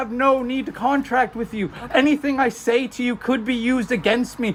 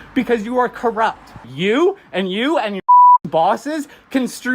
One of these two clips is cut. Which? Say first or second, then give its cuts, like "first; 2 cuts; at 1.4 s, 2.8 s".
second; 1 cut; at 1.5 s